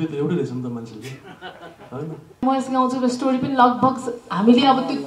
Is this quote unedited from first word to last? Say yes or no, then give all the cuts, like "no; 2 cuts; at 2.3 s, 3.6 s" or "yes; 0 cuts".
no; 1 cut; at 2.4 s